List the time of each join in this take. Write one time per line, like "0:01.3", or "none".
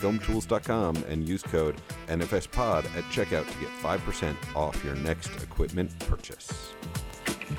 0:06.0

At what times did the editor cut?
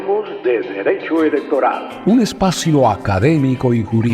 0:01.9

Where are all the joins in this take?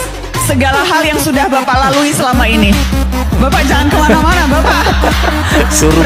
none

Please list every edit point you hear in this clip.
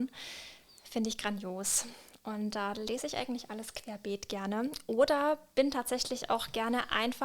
none

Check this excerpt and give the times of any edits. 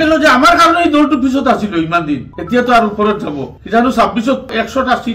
none

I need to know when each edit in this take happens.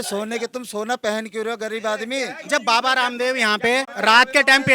0:02.4
0:03.9

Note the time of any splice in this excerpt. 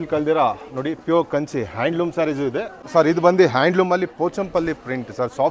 0:02.8

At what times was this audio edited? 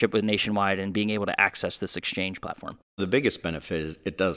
0:03.0

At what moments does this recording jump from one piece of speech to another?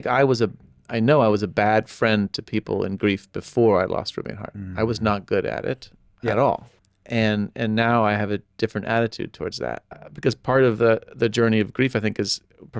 0:06.7
0:10.1

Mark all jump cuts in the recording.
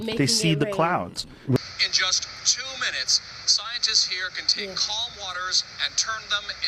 0:01.6

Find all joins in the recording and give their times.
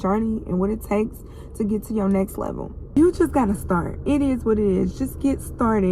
0:02.9

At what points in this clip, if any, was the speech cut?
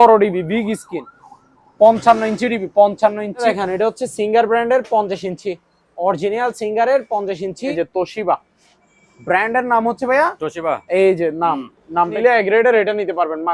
0:03.4
0:07.7
0:12.1

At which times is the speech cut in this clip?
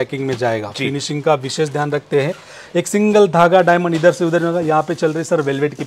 none

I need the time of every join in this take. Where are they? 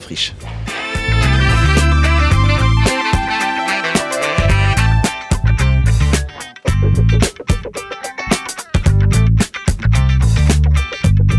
none

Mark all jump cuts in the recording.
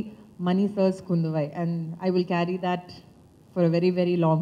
none

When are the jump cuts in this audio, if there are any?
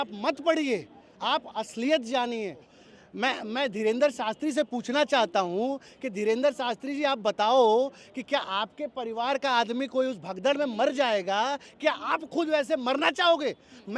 0:02.7

